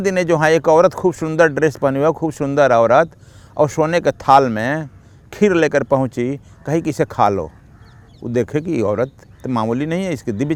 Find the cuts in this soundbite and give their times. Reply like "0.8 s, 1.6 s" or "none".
none